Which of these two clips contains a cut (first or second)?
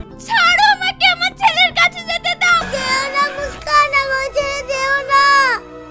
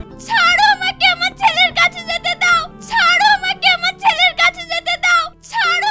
first